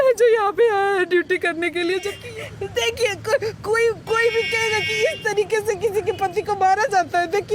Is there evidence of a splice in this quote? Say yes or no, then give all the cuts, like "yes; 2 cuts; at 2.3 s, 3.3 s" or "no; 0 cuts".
yes; 1 cut; at 2.2 s